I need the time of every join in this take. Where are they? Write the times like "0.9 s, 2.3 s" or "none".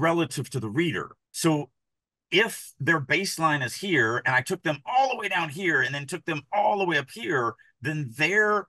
1.2 s